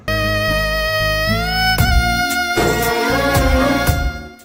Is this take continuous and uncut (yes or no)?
yes